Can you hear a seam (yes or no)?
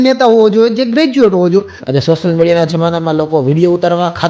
yes